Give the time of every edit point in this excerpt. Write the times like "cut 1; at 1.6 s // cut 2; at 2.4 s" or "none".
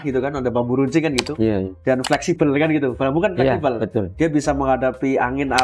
none

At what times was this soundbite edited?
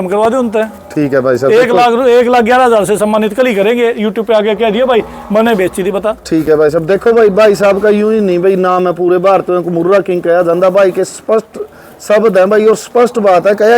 none

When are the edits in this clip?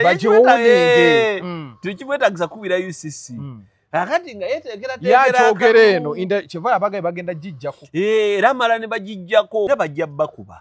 cut 1; at 9.7 s

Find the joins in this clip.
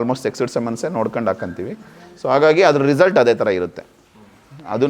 none

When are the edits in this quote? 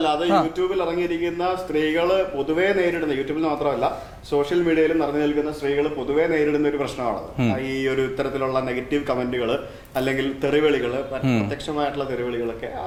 none

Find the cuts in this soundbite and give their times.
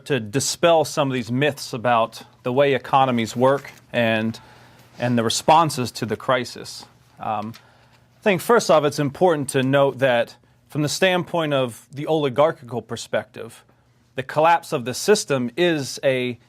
cut 1; at 3.8 s

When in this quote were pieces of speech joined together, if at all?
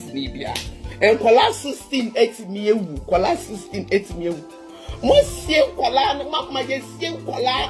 none

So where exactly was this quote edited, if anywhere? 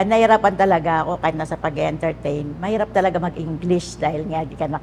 none

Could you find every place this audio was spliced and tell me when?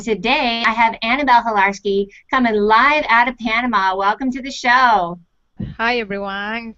none

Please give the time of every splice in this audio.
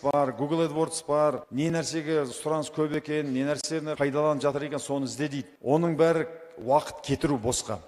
cut 1; at 1.4 s // cut 2; at 3.9 s // cut 3; at 5.5 s

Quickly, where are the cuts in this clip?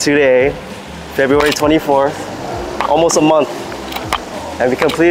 none

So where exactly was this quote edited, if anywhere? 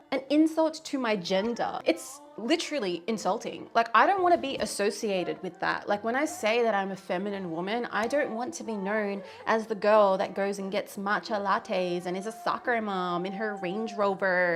none

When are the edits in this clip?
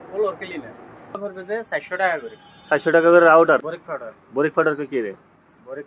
cut 1; at 1.2 s // cut 2; at 3.7 s

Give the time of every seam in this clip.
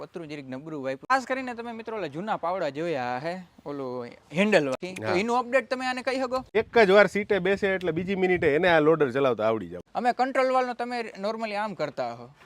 cut 1; at 1.1 s // cut 2; at 4.8 s // cut 3; at 6.5 s // cut 4; at 9.8 s

